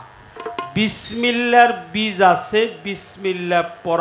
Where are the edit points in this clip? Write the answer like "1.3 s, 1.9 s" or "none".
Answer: none